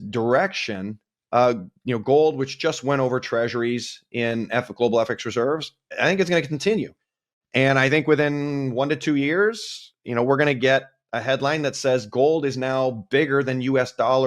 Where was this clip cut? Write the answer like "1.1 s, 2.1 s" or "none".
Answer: none

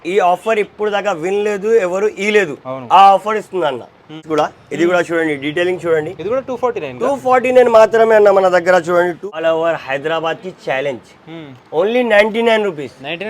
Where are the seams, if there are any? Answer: 4.2 s, 9.3 s

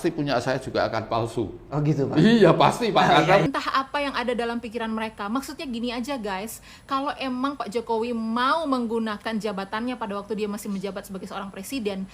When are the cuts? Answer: 3.4 s

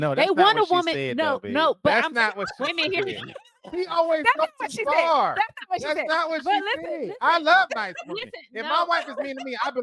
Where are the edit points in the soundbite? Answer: none

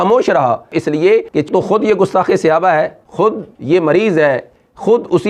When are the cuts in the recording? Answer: 3.0 s

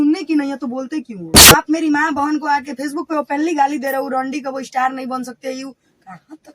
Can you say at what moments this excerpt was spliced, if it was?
1.3 s

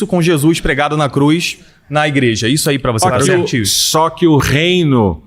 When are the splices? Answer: 3.0 s

